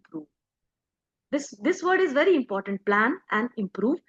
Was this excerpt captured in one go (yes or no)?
yes